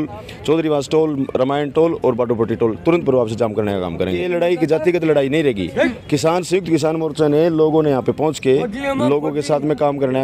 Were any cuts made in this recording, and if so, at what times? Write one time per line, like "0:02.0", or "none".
0:04.2

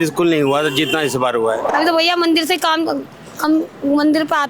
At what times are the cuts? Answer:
0:01.7

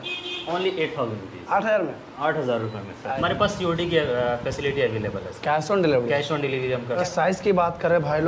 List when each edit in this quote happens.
0:03.2
0:07.0

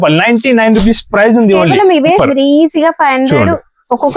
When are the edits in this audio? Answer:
0:02.2

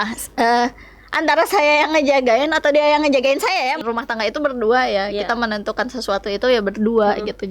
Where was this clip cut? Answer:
0:03.8

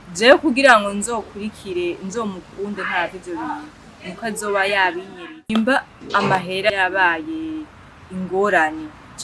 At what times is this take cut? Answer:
0:05.5
0:06.7

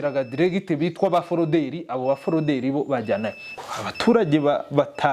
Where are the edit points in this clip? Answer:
0:03.5

